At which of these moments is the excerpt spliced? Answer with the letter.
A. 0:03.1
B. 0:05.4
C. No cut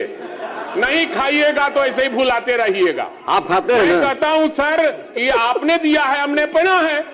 C